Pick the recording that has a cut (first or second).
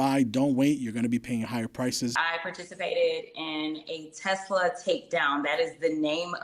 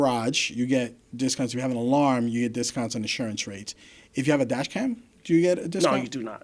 first